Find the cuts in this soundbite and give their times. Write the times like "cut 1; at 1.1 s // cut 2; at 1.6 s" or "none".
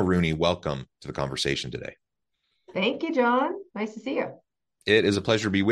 none